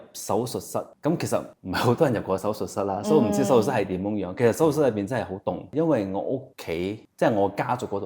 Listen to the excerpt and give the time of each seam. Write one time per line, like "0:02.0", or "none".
0:00.9
0:05.7